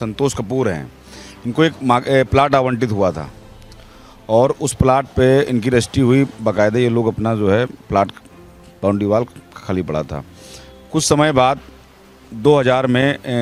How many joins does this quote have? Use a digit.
0